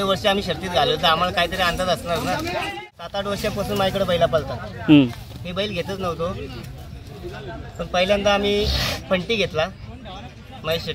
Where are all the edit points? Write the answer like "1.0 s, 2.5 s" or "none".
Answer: 2.7 s

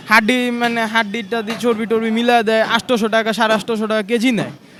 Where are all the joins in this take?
none

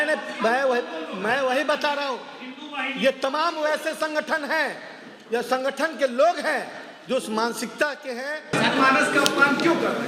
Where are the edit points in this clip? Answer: 8.5 s

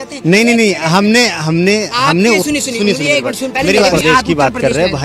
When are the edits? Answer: 3.9 s

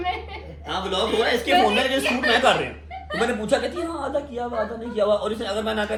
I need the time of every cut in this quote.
none

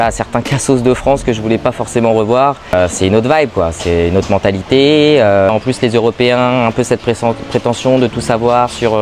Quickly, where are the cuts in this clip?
2.7 s, 5.5 s

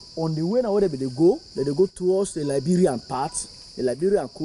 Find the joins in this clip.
none

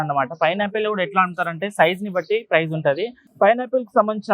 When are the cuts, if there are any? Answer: 3.2 s

